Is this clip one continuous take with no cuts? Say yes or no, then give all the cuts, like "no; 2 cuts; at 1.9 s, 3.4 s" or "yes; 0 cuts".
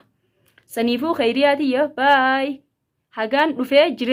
yes; 0 cuts